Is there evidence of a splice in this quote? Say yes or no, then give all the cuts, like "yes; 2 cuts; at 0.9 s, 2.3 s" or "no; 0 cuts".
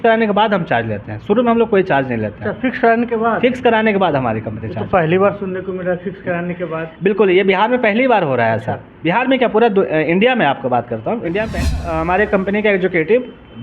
yes; 1 cut; at 11.7 s